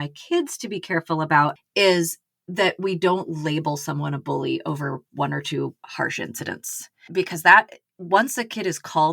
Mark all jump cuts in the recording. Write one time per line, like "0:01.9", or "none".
0:01.6
0:07.1